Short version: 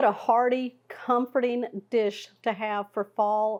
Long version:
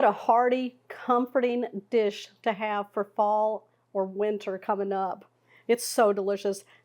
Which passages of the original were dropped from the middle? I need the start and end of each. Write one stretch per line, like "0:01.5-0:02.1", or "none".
none